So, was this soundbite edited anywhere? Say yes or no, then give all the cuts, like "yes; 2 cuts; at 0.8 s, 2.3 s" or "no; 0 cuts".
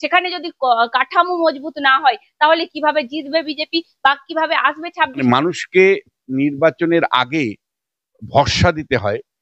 yes; 1 cut; at 5.2 s